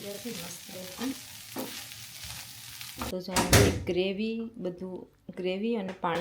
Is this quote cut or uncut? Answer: cut